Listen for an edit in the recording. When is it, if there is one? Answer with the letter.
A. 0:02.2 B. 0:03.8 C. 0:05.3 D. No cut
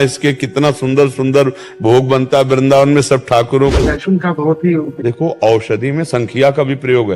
B